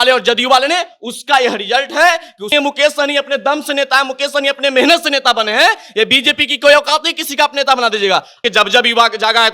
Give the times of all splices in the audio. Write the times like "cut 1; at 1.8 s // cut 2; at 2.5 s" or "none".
cut 1; at 2.5 s // cut 2; at 8.4 s